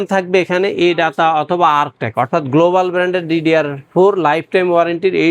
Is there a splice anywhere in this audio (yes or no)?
no